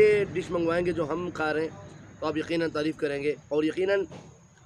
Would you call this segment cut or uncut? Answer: uncut